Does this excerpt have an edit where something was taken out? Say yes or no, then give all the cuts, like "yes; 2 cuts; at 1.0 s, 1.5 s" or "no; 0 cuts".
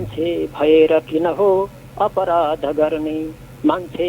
no; 0 cuts